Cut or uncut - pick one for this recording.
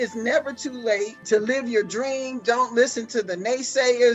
cut